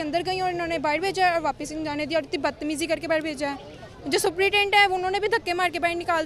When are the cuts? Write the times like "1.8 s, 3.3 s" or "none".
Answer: none